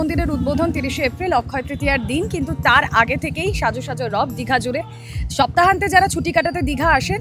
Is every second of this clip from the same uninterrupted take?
yes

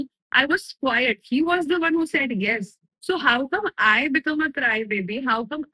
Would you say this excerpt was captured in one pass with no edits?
yes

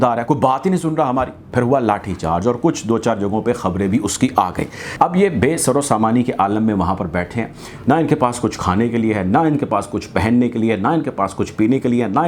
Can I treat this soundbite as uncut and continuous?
no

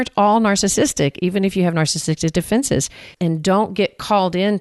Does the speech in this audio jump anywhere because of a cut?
yes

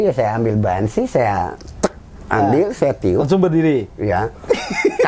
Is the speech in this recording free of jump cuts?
yes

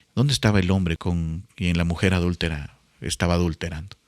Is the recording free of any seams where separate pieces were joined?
no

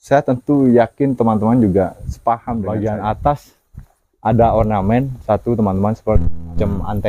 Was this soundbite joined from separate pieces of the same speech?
yes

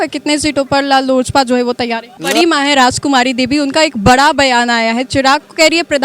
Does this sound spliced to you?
yes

